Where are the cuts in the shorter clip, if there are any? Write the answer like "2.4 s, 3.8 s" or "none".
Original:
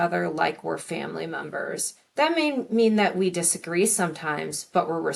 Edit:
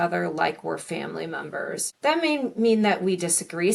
1.9 s